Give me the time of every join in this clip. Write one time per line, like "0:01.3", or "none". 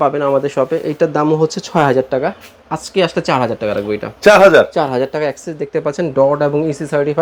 none